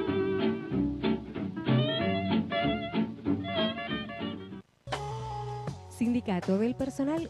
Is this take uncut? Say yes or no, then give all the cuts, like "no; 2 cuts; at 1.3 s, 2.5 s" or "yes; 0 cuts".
yes; 0 cuts